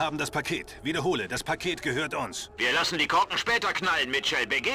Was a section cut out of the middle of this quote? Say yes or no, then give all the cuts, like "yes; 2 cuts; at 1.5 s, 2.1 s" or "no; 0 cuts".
yes; 1 cut; at 2.4 s